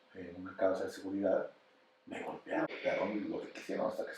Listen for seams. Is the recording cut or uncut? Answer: cut